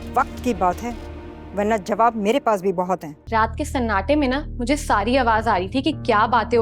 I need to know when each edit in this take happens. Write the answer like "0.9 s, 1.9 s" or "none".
3.1 s